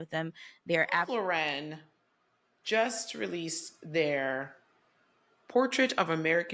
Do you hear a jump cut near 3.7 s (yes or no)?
no